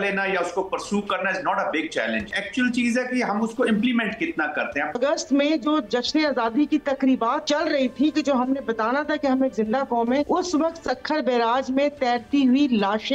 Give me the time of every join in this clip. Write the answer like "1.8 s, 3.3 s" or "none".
2.4 s, 5.0 s, 7.4 s, 10.3 s

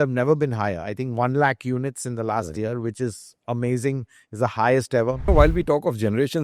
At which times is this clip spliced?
5.3 s

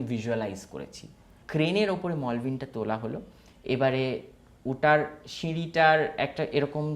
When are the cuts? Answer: 1.4 s

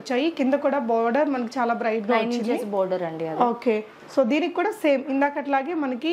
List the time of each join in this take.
none

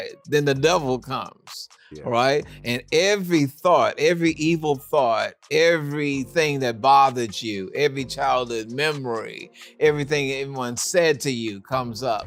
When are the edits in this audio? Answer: none

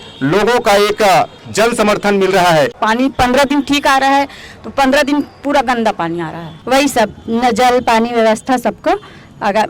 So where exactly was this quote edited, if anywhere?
2.8 s, 6.5 s

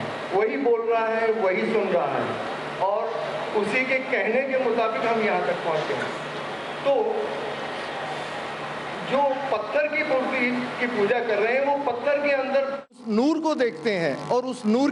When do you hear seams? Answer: none

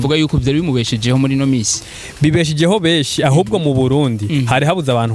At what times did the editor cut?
none

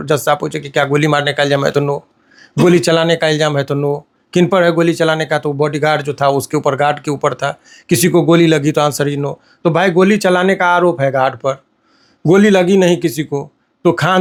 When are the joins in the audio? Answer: none

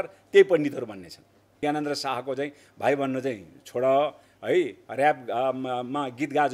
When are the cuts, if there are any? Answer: 1.6 s

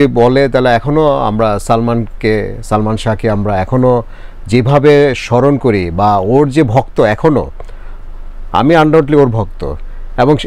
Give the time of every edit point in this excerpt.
none

